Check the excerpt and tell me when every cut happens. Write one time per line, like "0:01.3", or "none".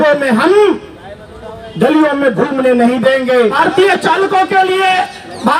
0:03.5